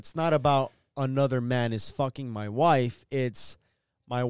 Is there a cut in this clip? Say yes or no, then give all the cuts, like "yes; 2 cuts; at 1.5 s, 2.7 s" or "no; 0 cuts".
no; 0 cuts